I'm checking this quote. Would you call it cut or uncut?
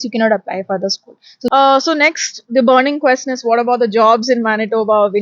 cut